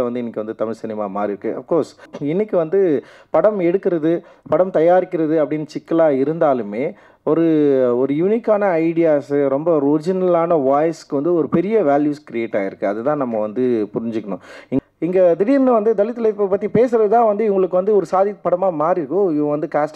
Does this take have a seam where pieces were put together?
yes; 2 cuts; at 2.1 s, 14.8 s

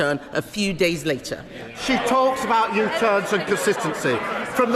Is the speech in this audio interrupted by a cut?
yes; 1 cut; at 1.8 s

